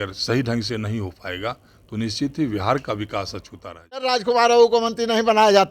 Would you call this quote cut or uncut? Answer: cut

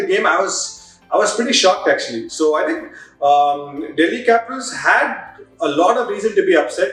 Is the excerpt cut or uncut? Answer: uncut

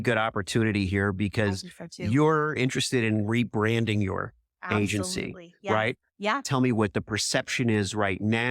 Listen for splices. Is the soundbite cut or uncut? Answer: cut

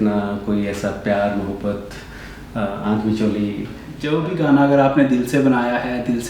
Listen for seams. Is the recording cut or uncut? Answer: cut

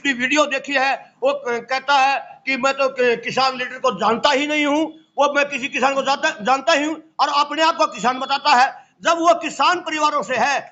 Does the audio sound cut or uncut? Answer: uncut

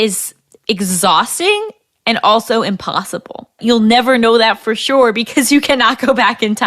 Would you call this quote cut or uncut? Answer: cut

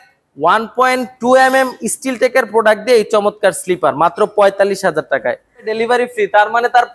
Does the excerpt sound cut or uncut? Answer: cut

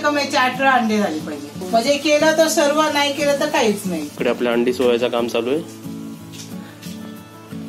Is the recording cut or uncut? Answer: cut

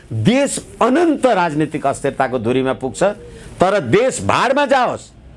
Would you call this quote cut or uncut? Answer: uncut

